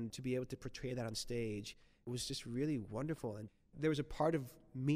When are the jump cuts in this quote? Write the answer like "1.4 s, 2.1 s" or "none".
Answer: 3.6 s